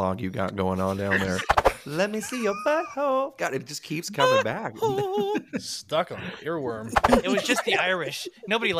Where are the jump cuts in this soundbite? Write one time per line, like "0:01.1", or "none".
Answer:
0:01.5
0:07.1